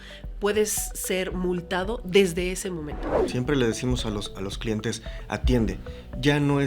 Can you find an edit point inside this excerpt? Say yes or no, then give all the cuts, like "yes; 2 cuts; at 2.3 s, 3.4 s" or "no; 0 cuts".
yes; 1 cut; at 3.2 s